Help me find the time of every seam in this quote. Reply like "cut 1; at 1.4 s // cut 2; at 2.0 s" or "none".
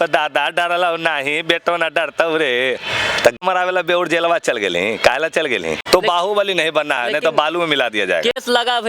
cut 1; at 3.4 s // cut 2; at 5.8 s